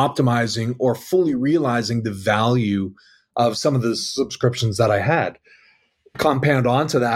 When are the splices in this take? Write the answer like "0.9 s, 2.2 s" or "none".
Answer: 6.1 s